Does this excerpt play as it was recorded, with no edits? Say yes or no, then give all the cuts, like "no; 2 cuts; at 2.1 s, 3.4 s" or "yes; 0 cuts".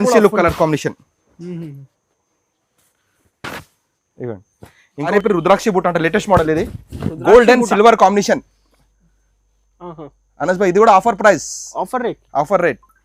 no; 1 cut; at 5.1 s